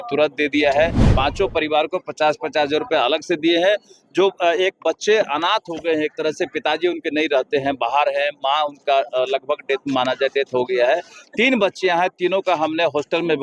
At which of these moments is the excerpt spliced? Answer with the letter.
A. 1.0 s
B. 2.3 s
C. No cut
A